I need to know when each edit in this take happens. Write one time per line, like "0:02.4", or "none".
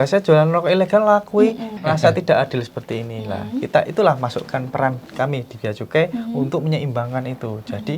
0:01.8